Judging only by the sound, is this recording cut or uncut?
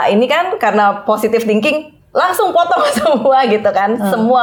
uncut